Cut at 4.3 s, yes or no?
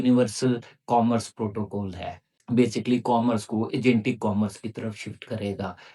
no